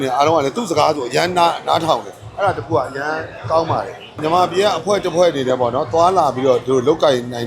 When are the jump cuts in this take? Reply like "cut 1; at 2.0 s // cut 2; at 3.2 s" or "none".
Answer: cut 1; at 4.2 s